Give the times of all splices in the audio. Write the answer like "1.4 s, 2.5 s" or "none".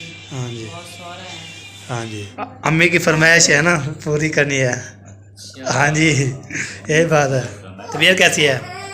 2.3 s, 7.8 s